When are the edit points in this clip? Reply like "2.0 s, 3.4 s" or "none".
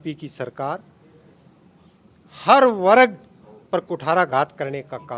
none